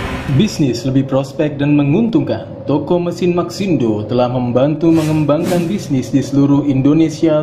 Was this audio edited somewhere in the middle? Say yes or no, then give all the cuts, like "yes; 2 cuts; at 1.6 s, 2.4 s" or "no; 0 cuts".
no; 0 cuts